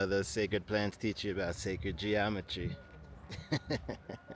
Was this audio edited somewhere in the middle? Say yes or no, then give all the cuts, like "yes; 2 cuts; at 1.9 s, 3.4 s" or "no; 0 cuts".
no; 0 cuts